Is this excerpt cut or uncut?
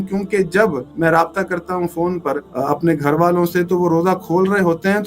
cut